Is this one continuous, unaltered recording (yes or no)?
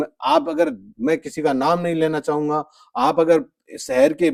yes